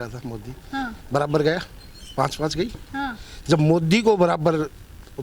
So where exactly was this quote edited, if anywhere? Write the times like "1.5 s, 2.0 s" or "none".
none